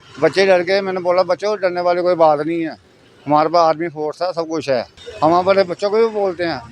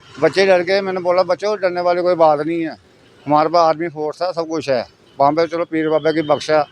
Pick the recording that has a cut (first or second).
first